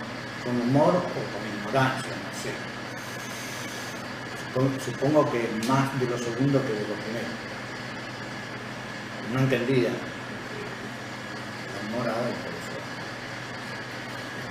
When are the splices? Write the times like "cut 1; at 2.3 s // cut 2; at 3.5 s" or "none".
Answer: none